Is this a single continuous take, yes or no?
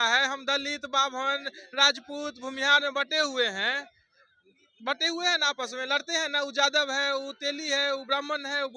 yes